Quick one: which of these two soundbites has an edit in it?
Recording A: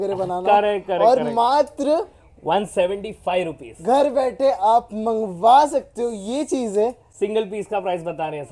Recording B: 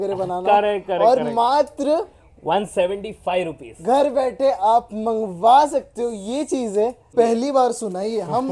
B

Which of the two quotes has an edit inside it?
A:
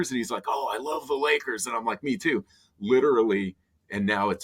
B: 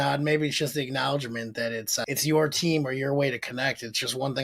B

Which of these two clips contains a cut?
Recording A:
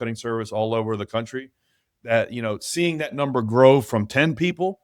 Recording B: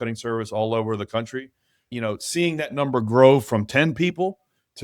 B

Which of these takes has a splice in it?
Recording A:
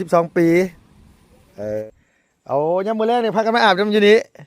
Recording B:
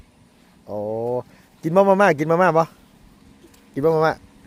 A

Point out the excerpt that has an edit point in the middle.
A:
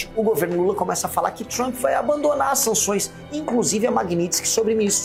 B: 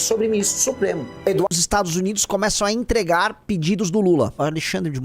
B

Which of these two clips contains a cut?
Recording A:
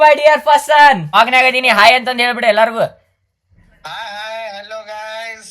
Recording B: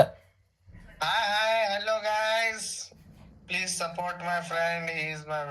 A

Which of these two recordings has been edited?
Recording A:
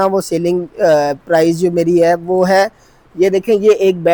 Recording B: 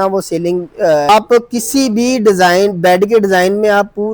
B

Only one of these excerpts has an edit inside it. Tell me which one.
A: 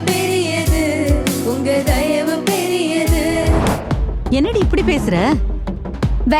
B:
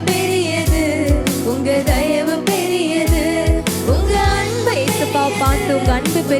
A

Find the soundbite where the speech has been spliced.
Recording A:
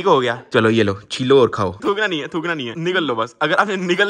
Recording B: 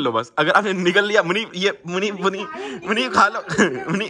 A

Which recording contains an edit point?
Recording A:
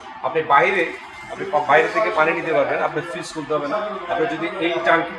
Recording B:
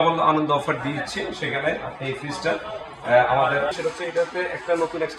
B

